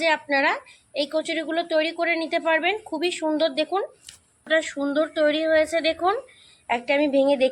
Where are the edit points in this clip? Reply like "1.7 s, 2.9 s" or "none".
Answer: 4.5 s